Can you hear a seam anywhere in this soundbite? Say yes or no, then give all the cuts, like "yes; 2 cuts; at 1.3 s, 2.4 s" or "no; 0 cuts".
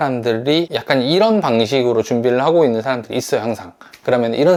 no; 0 cuts